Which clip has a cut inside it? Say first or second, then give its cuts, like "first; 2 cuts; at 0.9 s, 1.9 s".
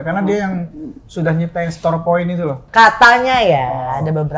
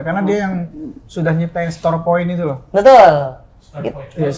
first; 1 cut; at 2.6 s